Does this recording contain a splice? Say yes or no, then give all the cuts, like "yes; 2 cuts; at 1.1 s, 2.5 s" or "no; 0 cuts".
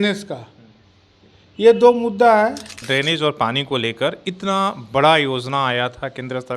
yes; 1 cut; at 2.8 s